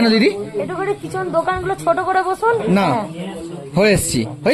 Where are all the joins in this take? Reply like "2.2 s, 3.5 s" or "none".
none